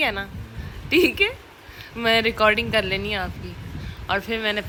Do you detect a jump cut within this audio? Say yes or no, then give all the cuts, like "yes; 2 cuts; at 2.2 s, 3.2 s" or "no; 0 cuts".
no; 0 cuts